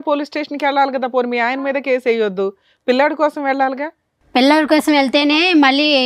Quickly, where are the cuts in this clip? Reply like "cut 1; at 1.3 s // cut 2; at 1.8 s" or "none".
none